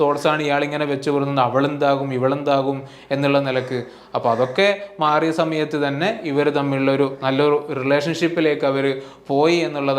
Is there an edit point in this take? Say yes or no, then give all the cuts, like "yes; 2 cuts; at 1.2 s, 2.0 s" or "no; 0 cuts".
no; 0 cuts